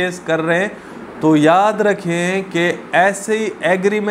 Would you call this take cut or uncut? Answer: uncut